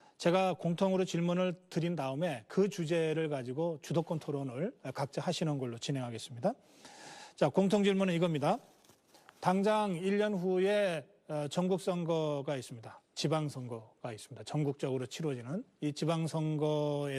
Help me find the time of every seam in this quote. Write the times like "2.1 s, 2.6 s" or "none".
4.0 s